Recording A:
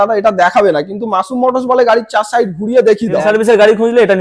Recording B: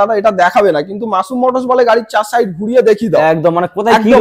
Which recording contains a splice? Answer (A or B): A